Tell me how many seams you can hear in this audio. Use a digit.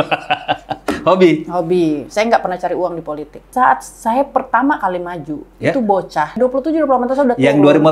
2